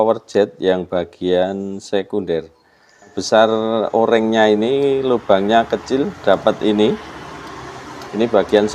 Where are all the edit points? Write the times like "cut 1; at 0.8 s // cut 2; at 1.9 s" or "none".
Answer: cut 1; at 3.2 s